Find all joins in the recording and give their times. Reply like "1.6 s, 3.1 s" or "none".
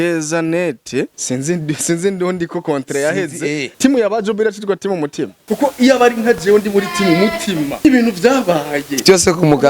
1.2 s, 3.7 s, 5.3 s, 7.7 s